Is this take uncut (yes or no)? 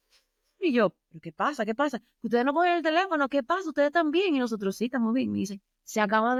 yes